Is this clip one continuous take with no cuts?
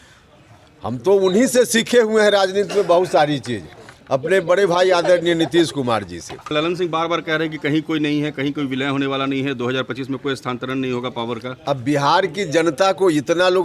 no; 1 cut; at 6.5 s

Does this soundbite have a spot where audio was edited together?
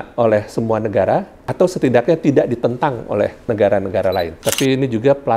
yes; 3 cuts; at 1.4 s, 3.4 s, 4.3 s

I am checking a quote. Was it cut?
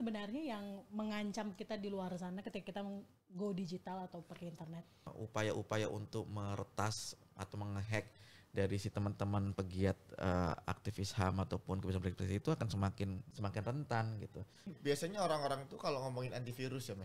yes; 3 cuts; at 5.1 s, 13.3 s, 14.7 s

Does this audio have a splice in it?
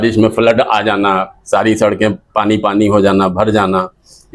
no; 0 cuts

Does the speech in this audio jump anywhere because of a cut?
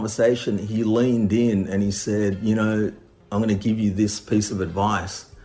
no; 0 cuts

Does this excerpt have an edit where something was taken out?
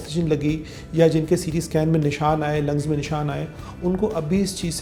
no; 0 cuts

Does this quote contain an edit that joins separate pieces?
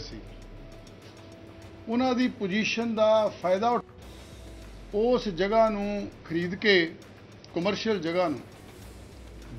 no; 0 cuts

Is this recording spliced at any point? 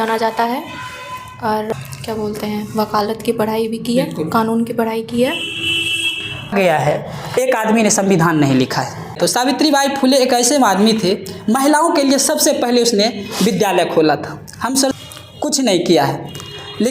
yes; 4 cuts; at 1.7 s, 6.5 s, 9.2 s, 14.9 s

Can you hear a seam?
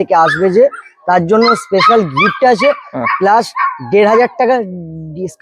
no; 0 cuts

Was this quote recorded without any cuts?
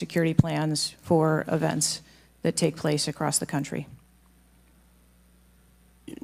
yes; 0 cuts

